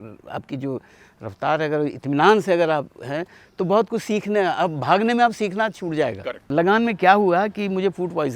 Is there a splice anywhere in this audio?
yes; 1 cut; at 6.5 s

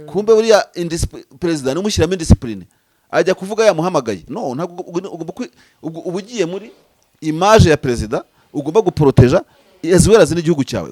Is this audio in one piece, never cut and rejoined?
yes; 0 cuts

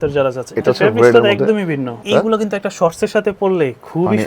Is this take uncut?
no; 1 cut; at 2.0 s

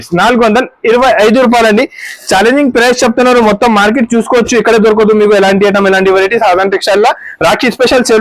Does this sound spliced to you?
no; 0 cuts

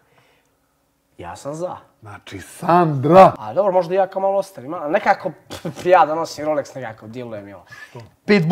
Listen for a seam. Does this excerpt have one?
yes; 1 cut; at 3.4 s

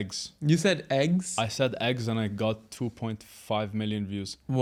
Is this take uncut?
yes; 0 cuts

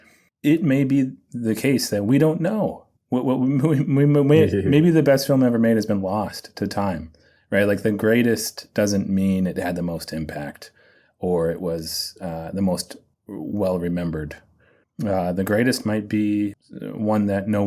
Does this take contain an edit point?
yes; 1 cut; at 16.6 s

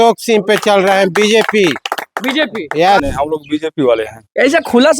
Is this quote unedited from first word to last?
no; 1 cut; at 3.0 s

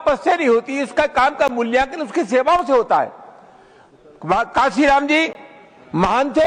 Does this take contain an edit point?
no; 0 cuts

